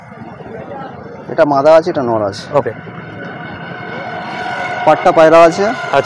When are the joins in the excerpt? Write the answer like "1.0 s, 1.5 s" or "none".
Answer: none